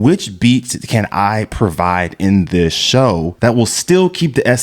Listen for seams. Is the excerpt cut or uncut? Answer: cut